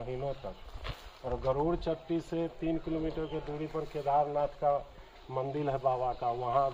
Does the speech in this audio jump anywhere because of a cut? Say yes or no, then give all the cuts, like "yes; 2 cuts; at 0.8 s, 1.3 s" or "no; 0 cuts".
no; 0 cuts